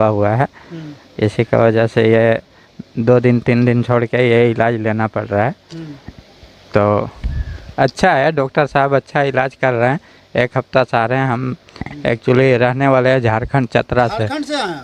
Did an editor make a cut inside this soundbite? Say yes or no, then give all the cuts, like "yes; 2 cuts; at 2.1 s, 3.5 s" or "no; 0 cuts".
no; 0 cuts